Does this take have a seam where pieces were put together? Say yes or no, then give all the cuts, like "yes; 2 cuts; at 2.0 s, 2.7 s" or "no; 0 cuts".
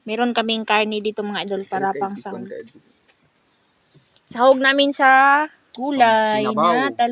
no; 0 cuts